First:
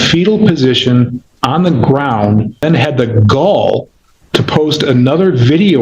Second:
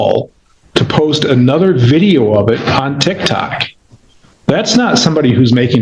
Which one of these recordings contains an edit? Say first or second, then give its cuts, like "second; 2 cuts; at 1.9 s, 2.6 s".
first; 1 cut; at 2.6 s